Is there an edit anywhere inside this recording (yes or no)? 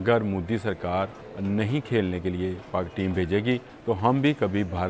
yes